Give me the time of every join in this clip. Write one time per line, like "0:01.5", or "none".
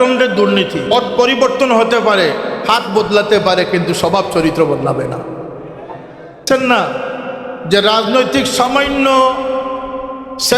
0:00.9
0:06.5